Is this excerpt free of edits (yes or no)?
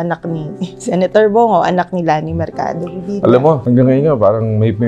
no